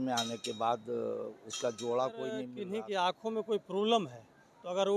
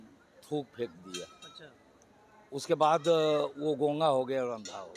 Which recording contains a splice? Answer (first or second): first